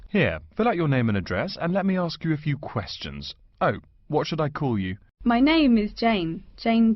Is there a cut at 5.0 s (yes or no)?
yes